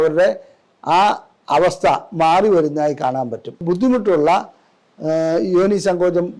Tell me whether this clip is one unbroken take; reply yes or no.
no